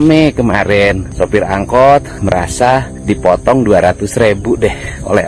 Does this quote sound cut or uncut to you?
cut